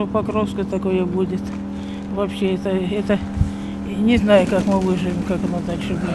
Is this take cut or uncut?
uncut